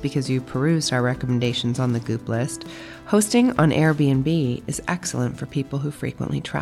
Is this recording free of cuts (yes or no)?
yes